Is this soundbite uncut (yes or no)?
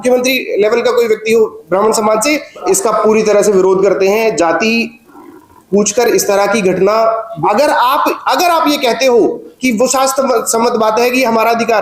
no